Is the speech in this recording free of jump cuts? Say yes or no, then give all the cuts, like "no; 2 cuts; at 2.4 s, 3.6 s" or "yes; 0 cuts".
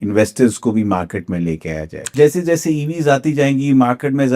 no; 1 cut; at 2.0 s